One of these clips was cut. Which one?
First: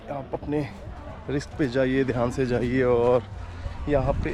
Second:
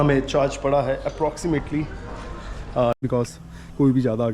second; 1 cut; at 2.9 s

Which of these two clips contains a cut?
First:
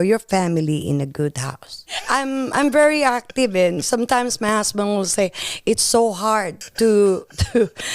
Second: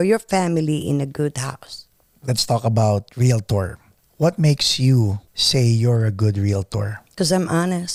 first; 2 cuts; at 2.0 s, 6.6 s

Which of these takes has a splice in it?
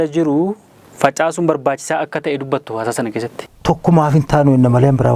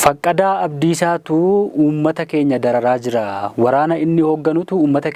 first; 1 cut; at 3.4 s

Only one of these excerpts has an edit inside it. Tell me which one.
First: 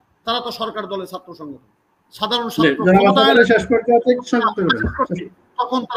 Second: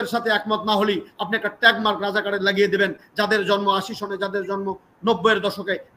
first; 1 cut; at 2.0 s

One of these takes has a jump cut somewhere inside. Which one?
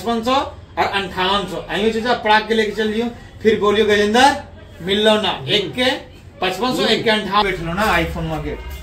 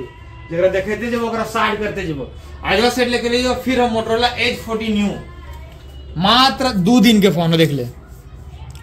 first; 1 cut; at 7.4 s

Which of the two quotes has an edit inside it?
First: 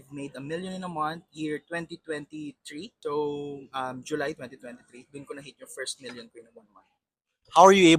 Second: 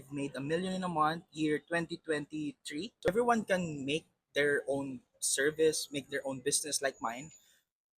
second; 1 cut; at 3.1 s

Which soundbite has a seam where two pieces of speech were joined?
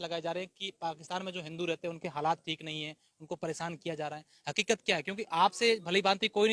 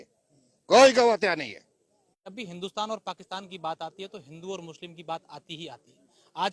second; 1 cut; at 2.4 s

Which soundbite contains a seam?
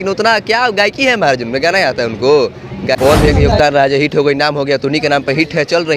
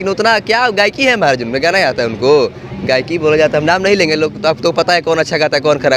first; 1 cut; at 3.0 s

